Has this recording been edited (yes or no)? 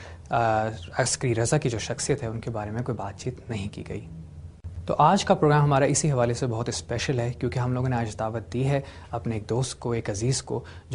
no